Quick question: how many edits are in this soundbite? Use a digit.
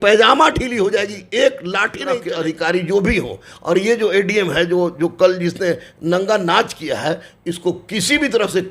1